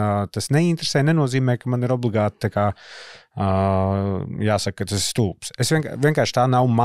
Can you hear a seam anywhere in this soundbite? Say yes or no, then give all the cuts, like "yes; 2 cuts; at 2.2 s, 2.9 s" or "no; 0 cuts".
no; 0 cuts